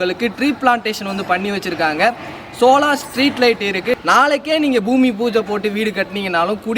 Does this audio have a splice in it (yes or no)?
yes